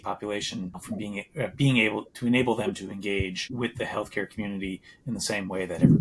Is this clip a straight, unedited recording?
yes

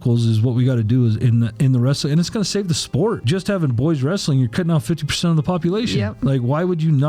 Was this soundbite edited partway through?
yes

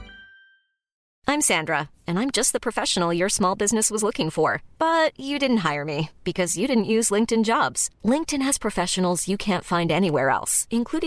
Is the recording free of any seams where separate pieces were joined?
no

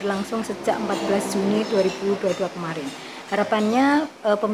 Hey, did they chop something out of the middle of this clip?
no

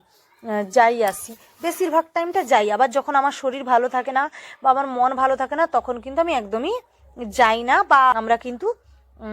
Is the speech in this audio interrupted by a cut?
yes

